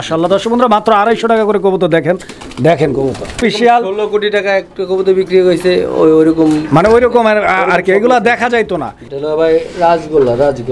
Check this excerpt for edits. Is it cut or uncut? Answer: cut